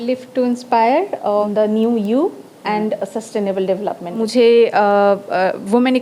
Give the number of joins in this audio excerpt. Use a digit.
2